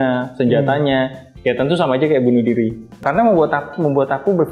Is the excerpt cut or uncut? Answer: cut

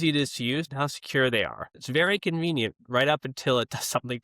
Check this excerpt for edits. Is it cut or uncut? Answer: cut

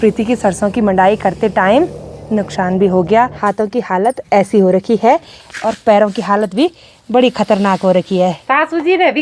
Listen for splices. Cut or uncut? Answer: cut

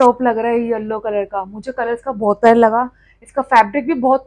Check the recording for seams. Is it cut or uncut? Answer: uncut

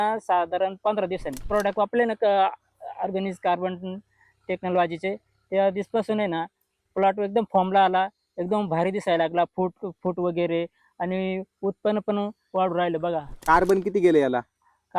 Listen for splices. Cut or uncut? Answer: cut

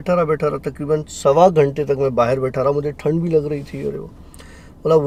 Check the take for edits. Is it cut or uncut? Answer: uncut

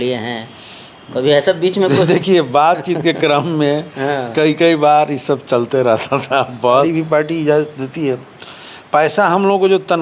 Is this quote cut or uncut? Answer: cut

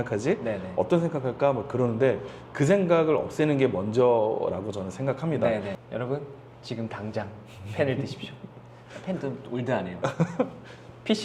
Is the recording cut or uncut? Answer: cut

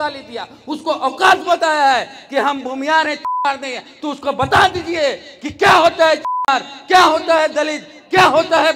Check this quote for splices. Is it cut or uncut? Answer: uncut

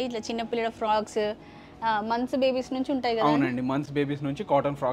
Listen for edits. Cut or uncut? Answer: uncut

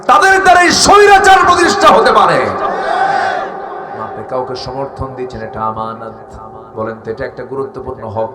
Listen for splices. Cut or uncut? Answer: cut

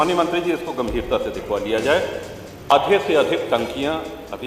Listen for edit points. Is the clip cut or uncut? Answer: cut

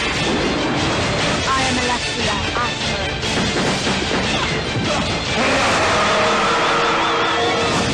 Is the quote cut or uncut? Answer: uncut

